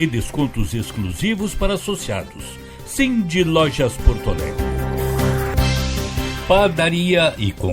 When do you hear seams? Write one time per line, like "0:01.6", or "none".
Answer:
0:04.6
0:06.4